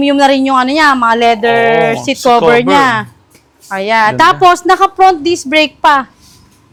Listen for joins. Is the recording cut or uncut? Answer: uncut